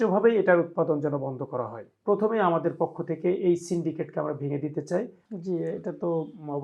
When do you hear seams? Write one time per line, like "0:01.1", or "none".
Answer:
0:01.9
0:05.2

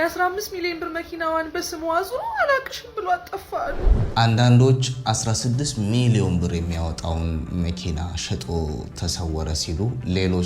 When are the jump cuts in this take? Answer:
0:04.1

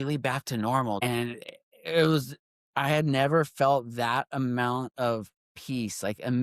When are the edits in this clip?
0:01.0

